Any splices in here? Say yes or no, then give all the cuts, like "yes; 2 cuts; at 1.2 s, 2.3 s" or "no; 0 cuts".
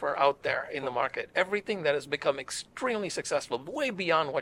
no; 0 cuts